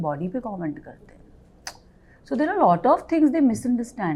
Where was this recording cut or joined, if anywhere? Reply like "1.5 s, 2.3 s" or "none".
none